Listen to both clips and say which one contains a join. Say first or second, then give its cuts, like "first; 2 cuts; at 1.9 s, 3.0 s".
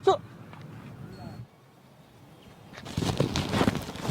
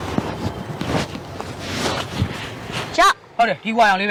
first; 2 cuts; at 1.4 s, 2.9 s